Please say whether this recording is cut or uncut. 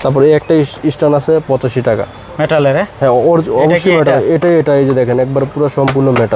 uncut